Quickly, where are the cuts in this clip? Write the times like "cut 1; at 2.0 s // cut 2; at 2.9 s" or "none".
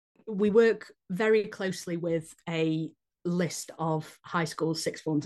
none